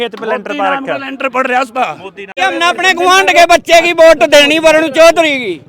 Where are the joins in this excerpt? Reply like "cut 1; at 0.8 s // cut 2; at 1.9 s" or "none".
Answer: cut 1; at 2.3 s